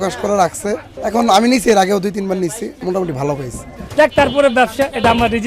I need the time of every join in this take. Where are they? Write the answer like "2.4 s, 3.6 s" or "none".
0.9 s, 2.8 s, 3.7 s